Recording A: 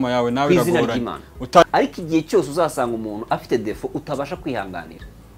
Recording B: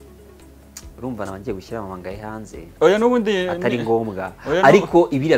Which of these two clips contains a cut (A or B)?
A